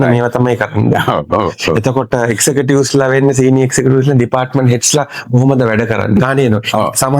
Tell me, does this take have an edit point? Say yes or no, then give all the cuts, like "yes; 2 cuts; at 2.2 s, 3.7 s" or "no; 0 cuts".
yes; 1 cut; at 6.2 s